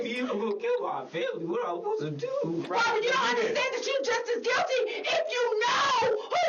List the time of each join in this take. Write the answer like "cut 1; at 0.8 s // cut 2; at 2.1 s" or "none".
cut 1; at 2.6 s